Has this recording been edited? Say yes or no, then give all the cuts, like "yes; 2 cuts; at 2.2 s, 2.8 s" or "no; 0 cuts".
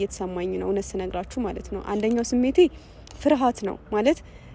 no; 0 cuts